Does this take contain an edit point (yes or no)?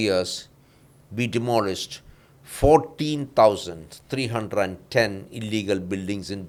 no